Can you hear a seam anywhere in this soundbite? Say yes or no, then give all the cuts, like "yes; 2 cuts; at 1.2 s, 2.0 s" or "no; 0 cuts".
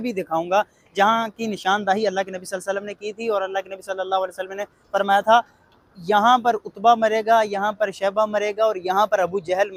no; 0 cuts